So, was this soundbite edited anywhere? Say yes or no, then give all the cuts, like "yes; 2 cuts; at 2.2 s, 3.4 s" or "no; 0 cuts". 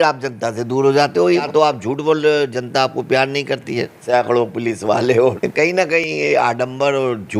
yes; 3 cuts; at 1.4 s, 4.0 s, 5.7 s